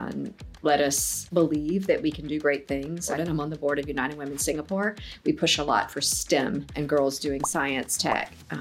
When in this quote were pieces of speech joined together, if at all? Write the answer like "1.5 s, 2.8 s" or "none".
3.1 s